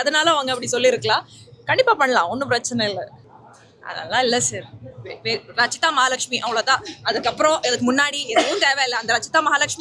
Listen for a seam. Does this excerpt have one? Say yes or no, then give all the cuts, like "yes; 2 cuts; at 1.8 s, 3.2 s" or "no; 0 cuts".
yes; 1 cut; at 3.2 s